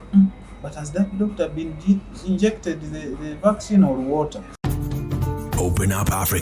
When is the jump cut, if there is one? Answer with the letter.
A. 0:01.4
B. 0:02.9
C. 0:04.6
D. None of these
C